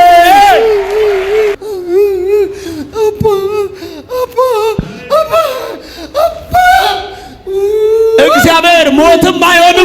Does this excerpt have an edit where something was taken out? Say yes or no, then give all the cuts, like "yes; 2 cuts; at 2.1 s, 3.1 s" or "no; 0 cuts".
yes; 1 cut; at 1.6 s